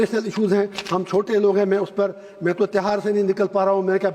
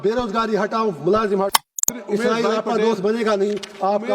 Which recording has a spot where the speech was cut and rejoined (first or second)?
second